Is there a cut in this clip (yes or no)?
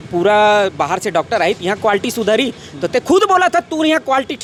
no